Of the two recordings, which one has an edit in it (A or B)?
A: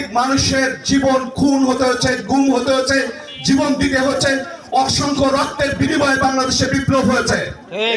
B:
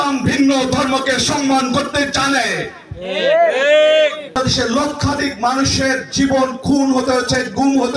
B